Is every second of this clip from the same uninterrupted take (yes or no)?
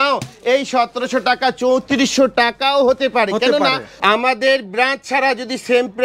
no